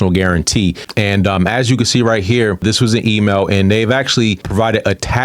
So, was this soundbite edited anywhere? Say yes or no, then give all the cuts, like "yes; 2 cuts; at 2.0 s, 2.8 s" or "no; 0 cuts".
yes; 3 cuts; at 0.8 s, 2.6 s, 4.4 s